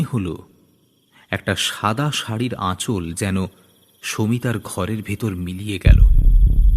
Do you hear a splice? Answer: yes; 1 cut; at 5.8 s

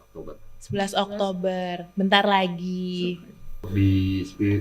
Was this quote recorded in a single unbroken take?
no; 1 cut; at 3.7 s

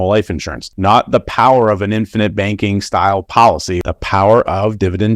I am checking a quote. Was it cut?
yes; 1 cut; at 3.8 s

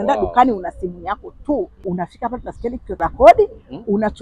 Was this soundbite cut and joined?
yes; 2 cuts; at 1.8 s, 3.0 s

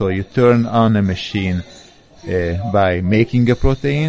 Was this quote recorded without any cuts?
yes; 0 cuts

